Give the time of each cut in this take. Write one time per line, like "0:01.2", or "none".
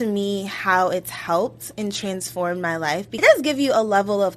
0:03.1